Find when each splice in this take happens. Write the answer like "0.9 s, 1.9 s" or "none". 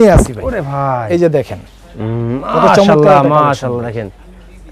none